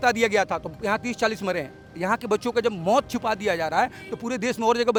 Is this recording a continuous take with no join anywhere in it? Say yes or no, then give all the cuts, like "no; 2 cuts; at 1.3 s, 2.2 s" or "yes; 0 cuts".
yes; 0 cuts